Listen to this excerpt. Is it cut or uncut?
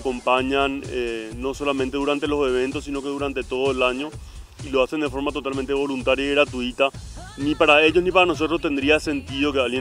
uncut